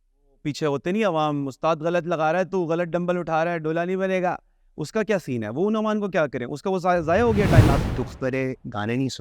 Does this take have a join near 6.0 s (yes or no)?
no